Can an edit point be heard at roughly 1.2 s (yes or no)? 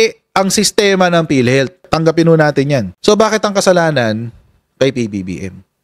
no